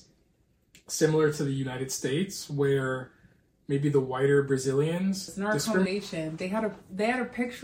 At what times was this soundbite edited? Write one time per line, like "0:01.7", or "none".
0:05.9